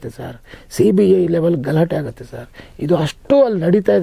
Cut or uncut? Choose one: uncut